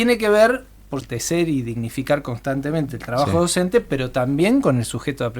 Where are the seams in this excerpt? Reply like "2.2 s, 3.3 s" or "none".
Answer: 1.1 s